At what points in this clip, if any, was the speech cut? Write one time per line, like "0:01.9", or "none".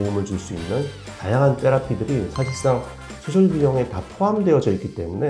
none